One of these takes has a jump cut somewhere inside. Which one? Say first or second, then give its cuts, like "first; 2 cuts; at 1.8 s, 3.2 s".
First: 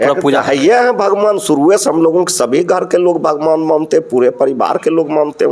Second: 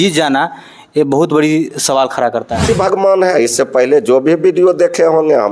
second; 1 cut; at 2.7 s